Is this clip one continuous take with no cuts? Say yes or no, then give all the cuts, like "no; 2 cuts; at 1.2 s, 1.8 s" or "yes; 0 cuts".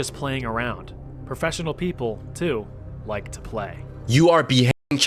yes; 0 cuts